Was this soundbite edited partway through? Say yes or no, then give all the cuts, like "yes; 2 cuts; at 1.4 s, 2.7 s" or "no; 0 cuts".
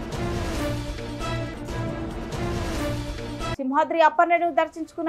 yes; 1 cut; at 3.5 s